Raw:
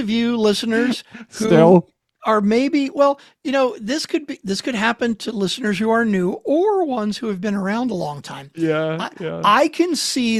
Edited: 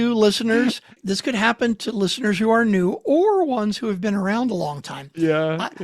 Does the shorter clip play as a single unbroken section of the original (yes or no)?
no